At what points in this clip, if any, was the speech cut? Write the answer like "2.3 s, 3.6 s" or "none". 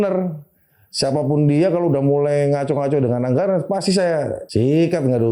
4.4 s